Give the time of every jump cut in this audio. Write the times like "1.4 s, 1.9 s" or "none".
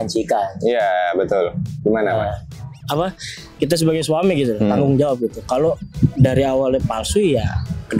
2.8 s

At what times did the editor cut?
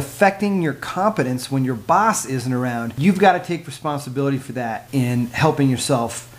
2.9 s, 4.8 s

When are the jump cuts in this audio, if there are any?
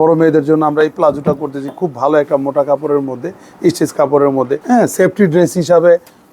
4.6 s

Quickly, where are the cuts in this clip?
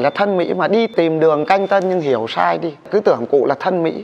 0.9 s, 2.9 s

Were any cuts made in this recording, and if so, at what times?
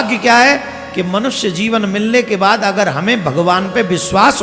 none

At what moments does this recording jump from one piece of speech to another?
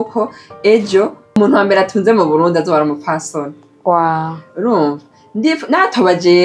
1.4 s

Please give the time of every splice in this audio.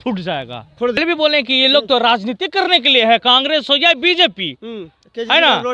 1.0 s

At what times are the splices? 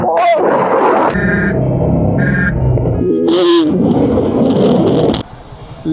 none

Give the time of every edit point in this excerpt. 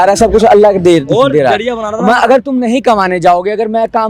none

